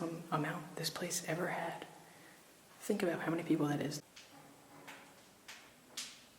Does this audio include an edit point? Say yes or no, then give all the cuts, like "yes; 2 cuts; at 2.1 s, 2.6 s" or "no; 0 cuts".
yes; 1 cut; at 4.0 s